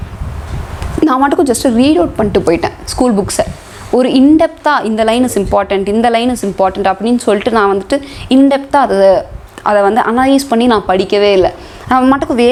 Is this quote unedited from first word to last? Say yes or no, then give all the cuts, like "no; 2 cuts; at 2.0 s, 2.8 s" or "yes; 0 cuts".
yes; 0 cuts